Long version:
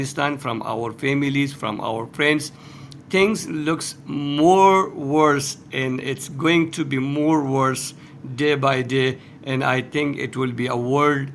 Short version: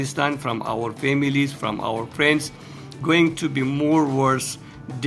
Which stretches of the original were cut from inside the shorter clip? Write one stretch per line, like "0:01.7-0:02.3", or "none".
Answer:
0:02.8-0:06.2